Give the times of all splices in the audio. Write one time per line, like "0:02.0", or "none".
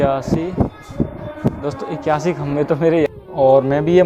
0:03.1